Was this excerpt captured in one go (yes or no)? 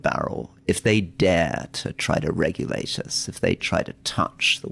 yes